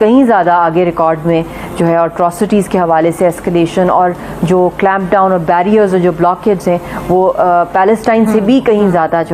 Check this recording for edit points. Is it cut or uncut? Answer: uncut